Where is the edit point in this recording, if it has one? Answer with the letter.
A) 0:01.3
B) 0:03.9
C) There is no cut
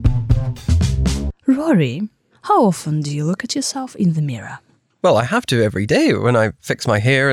A